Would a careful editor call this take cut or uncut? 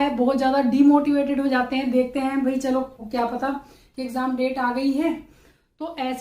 uncut